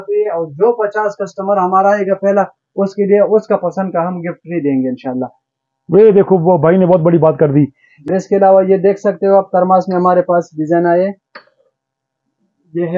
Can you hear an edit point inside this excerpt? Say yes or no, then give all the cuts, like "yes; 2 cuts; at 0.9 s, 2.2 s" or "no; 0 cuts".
yes; 1 cut; at 8.1 s